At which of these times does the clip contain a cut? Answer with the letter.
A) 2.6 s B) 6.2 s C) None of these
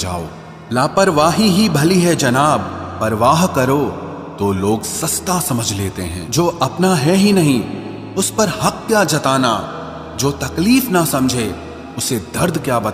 B